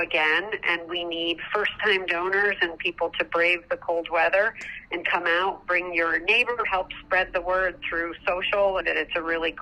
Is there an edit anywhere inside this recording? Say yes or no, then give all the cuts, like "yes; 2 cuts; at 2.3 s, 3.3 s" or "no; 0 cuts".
yes; 2 cuts; at 6.7 s, 8.8 s